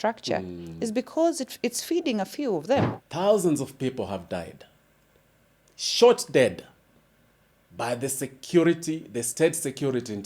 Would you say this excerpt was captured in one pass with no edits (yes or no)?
no